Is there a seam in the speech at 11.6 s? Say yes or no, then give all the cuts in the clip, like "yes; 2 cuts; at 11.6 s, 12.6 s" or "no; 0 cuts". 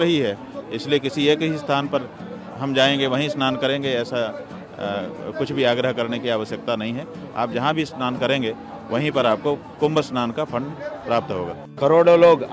yes; 1 cut; at 11.6 s